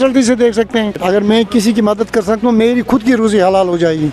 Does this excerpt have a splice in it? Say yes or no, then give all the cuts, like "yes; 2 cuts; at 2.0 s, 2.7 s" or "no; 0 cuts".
yes; 1 cut; at 1.0 s